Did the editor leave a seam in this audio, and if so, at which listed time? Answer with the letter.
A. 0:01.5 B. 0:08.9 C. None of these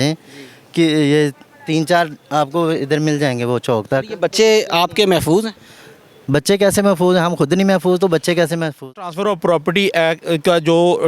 B